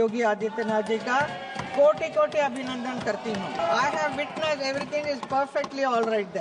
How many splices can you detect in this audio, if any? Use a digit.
1